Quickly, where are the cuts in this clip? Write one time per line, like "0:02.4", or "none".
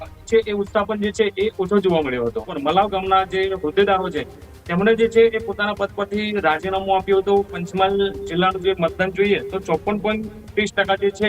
0:02.5
0:07.6